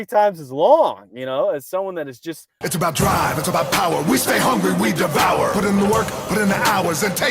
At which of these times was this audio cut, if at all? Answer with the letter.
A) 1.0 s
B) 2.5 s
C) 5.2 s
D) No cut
B